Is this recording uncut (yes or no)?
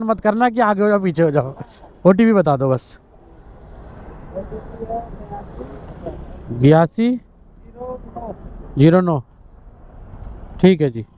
yes